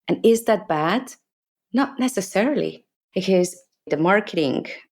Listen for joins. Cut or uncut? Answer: cut